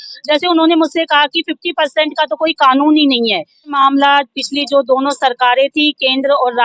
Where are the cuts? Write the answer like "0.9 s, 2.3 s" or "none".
3.7 s